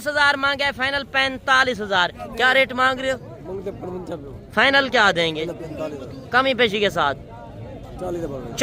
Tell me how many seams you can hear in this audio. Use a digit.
1